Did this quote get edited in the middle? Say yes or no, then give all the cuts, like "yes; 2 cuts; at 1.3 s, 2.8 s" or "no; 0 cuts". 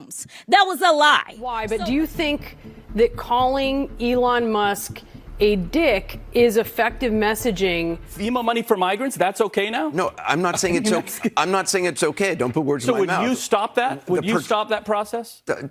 yes; 2 cuts; at 1.6 s, 8.1 s